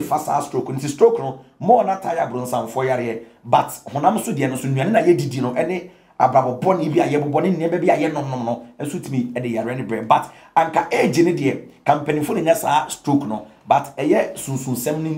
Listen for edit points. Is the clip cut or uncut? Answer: uncut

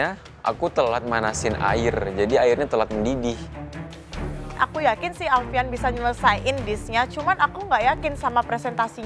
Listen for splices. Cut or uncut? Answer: uncut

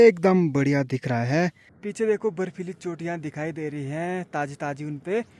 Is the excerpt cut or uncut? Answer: cut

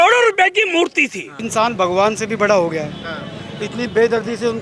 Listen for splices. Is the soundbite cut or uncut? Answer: cut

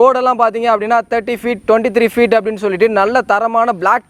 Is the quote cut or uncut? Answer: uncut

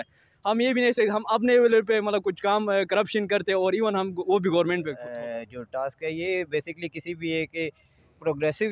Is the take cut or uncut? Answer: cut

